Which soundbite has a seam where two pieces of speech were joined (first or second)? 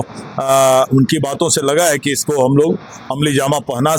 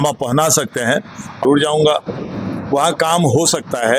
second